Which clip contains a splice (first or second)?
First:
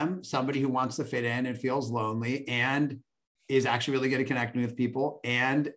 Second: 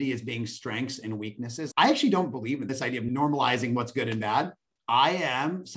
second